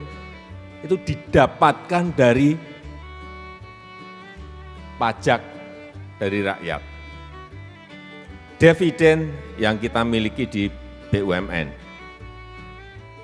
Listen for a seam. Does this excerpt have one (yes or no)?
yes